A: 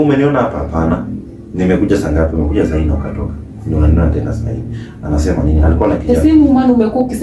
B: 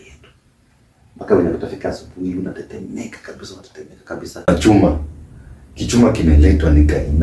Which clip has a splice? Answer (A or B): B